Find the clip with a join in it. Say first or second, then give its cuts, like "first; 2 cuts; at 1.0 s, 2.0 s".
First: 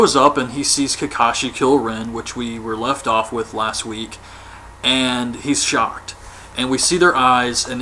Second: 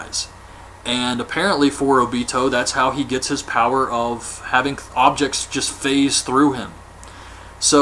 second; 1 cut; at 3.7 s